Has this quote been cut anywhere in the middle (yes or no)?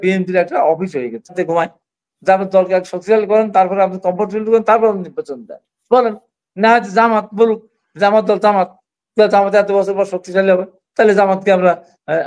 yes